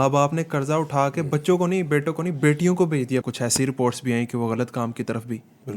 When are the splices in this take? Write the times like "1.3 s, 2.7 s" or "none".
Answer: 3.2 s

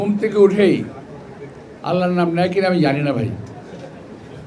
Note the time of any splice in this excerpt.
none

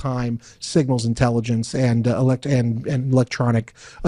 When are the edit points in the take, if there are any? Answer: none

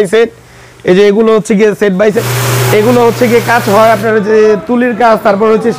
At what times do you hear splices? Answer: 2.2 s

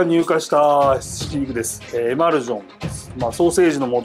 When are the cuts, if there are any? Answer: 1.8 s

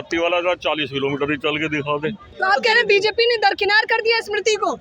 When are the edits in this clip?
2.3 s

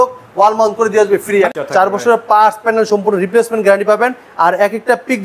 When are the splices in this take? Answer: 1.5 s

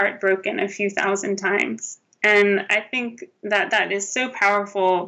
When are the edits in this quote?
none

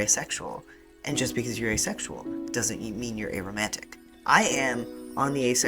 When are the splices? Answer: 4.1 s

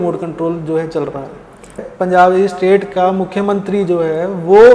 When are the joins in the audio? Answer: 1.8 s

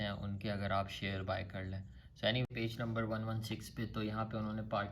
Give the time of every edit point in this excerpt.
2.4 s

